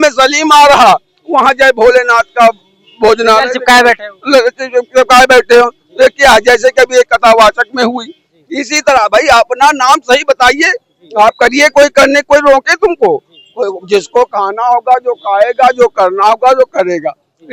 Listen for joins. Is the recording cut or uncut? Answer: uncut